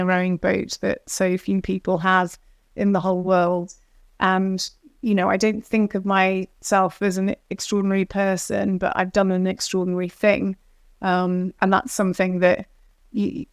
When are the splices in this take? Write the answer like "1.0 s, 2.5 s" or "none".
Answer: none

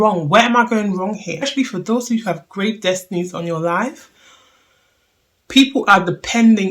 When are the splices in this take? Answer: 1.5 s

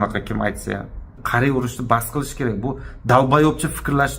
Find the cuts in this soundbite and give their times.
1.2 s

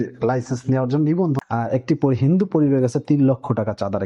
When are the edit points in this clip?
1.4 s

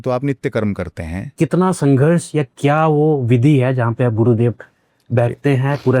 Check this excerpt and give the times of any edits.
1.3 s

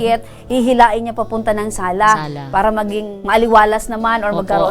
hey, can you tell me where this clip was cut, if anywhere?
3.1 s

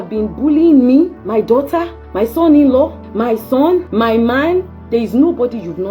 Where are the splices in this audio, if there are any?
1.2 s, 2.0 s, 3.0 s, 3.9 s

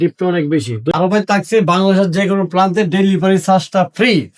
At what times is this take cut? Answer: 0.9 s

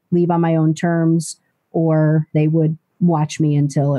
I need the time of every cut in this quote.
2.4 s

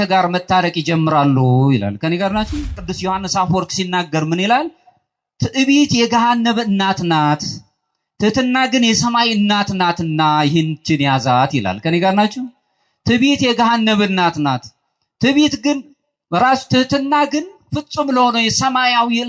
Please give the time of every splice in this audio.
2.9 s

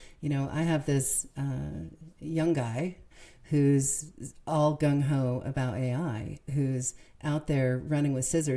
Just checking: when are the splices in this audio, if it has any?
none

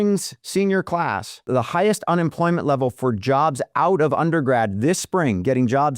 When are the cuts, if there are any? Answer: 1.5 s

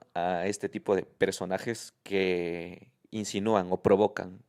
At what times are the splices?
none

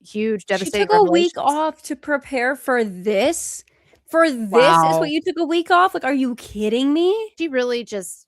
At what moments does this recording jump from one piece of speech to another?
7.3 s

